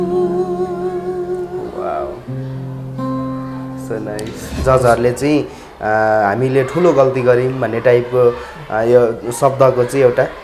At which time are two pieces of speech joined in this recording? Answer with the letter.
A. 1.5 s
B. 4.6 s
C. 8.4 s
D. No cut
B